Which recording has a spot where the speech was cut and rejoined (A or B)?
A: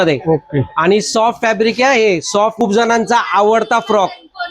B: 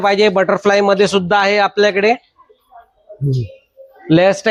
A